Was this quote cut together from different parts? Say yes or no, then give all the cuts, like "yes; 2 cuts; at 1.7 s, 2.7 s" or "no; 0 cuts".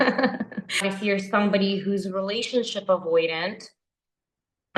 yes; 1 cut; at 0.9 s